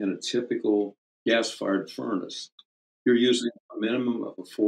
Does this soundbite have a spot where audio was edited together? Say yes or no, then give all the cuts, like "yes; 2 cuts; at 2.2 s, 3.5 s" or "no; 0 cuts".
yes; 1 cut; at 1.0 s